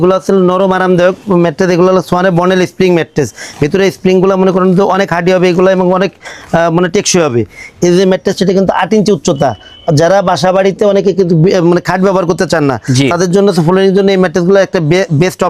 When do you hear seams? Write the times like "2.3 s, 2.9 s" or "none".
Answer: none